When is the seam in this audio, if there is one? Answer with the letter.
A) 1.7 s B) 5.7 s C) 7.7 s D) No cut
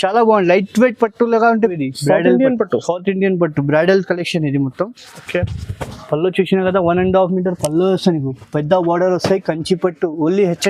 A